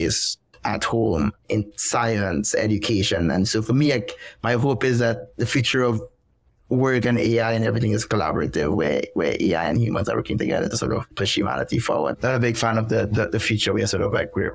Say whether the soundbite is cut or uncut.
cut